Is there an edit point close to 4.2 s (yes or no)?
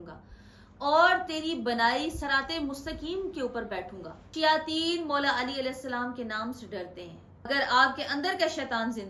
yes